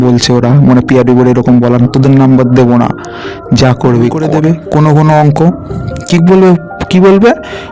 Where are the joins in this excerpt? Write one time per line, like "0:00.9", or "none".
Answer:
0:04.2